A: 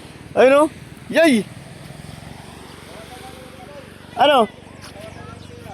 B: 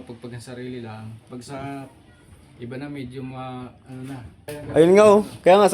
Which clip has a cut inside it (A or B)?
B